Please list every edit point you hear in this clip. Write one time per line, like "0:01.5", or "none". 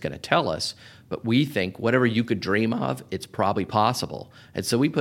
0:01.7
0:03.5